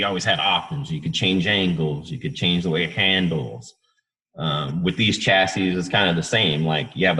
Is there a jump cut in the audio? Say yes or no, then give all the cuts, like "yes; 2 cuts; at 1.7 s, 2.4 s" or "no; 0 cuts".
no; 0 cuts